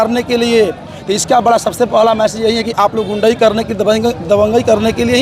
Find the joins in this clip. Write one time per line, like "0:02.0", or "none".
none